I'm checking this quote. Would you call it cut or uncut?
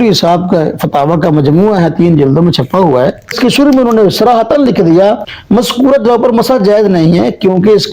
cut